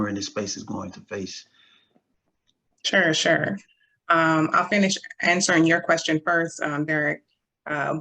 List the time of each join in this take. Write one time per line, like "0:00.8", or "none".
none